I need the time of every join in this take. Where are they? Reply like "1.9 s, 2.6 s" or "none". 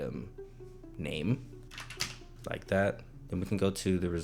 1.5 s, 3.1 s